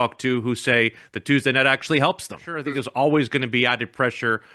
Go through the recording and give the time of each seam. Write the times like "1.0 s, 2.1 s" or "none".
2.5 s